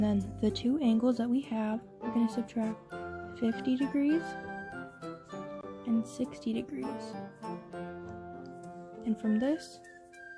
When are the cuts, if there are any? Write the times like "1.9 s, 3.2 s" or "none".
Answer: 7.4 s, 8.6 s, 9.6 s